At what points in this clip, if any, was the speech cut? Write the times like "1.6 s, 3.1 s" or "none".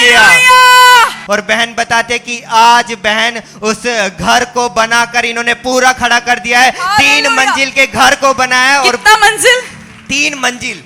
1.2 s